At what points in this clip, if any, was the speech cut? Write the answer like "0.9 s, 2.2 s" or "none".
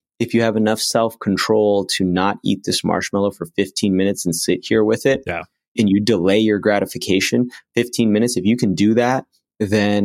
5.7 s